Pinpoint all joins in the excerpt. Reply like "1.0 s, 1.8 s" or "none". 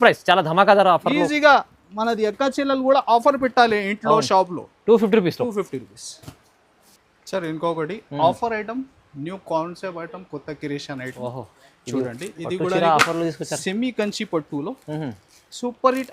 none